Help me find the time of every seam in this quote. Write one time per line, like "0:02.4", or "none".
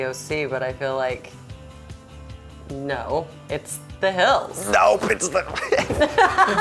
0:04.6